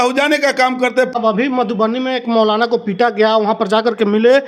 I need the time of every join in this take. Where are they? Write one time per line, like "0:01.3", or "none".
0:01.1